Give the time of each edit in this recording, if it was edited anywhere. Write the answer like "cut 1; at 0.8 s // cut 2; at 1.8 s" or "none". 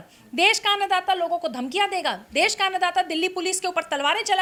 none